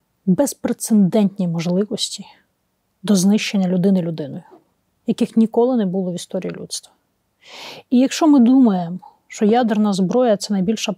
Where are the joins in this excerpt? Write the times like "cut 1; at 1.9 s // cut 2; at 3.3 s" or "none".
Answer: none